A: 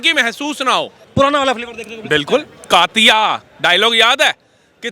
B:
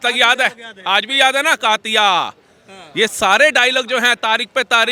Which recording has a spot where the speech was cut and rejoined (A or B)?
A